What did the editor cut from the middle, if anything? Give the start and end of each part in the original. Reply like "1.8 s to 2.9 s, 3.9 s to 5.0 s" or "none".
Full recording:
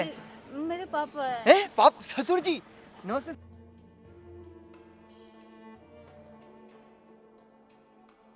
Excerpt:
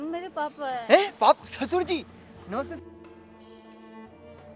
3.4 s to 4.5 s